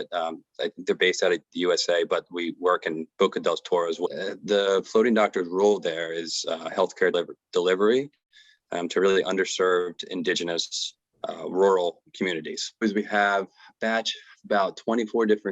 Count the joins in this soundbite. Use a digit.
3